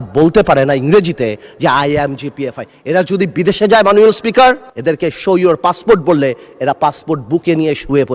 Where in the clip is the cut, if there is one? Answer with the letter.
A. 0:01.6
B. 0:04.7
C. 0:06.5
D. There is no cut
B